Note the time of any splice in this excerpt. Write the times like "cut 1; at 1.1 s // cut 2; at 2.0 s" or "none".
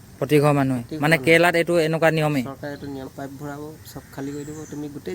cut 1; at 3.1 s